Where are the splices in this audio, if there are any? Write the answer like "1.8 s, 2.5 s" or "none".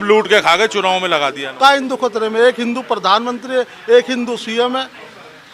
1.4 s